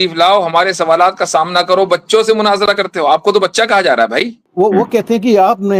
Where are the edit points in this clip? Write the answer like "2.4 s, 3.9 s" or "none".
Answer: 4.4 s